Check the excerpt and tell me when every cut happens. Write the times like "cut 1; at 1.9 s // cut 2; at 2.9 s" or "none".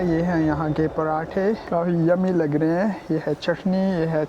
cut 1; at 1.6 s